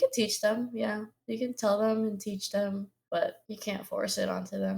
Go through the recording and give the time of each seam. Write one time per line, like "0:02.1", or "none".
0:03.1